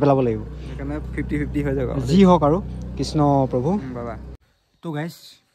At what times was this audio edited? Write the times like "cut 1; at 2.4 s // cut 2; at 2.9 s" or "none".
cut 1; at 4.5 s

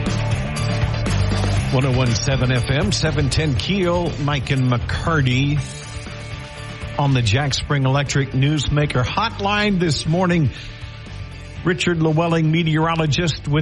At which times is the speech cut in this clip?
cut 1; at 1.7 s

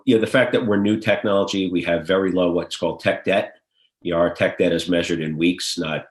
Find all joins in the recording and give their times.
none

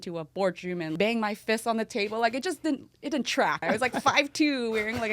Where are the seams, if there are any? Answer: cut 1; at 0.9 s // cut 2; at 3.6 s

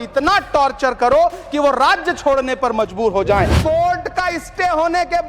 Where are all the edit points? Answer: cut 1; at 3.5 s

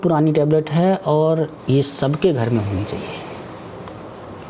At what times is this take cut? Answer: none

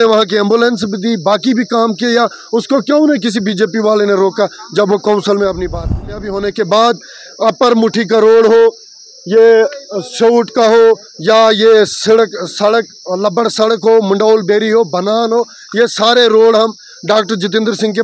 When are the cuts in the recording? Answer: cut 1; at 6.3 s

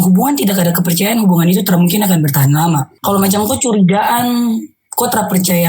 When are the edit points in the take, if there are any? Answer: cut 1; at 2.9 s

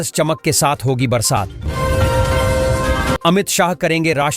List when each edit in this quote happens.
cut 1; at 1.7 s // cut 2; at 3.2 s

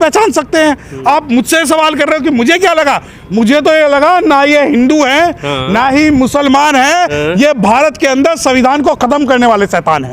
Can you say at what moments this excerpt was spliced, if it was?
none

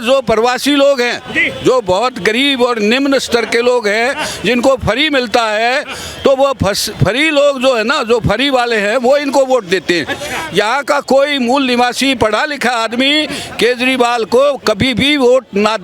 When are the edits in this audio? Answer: none

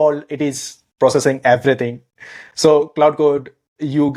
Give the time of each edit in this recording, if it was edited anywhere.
none

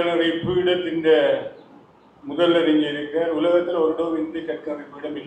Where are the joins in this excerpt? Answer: none

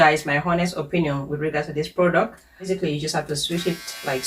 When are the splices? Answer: cut 1; at 2.7 s

